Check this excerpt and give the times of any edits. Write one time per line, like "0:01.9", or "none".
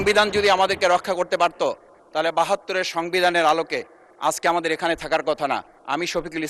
none